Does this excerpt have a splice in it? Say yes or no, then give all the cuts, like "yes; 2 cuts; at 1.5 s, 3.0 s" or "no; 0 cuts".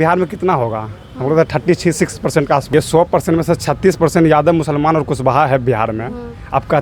yes; 1 cut; at 2.7 s